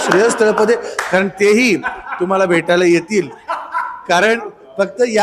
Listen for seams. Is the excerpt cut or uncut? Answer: uncut